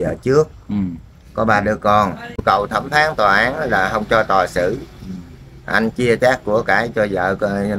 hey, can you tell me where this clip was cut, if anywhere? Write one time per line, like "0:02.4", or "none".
0:02.4